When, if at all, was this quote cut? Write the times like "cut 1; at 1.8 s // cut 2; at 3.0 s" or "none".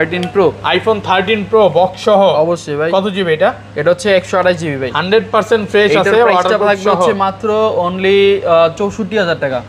none